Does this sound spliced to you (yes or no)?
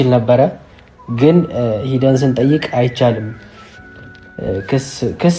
no